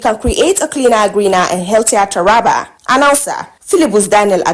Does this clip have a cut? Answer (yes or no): no